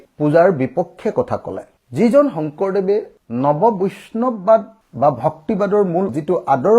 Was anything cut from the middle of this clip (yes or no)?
no